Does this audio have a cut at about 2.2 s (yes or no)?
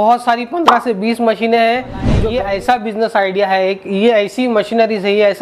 yes